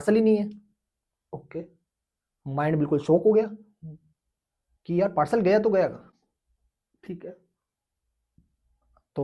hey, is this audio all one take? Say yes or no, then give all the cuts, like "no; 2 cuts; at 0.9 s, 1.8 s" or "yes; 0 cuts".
yes; 0 cuts